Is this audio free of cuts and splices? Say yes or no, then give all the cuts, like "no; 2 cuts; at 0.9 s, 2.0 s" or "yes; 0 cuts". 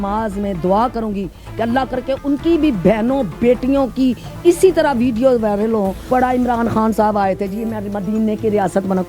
no; 1 cut; at 6.0 s